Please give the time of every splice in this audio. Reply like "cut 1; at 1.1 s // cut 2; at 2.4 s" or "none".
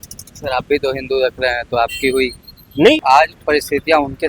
cut 1; at 3.0 s

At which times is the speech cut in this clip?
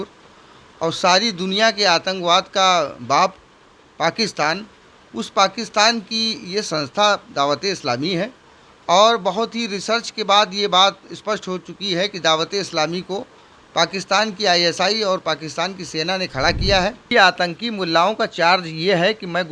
cut 1; at 17.1 s

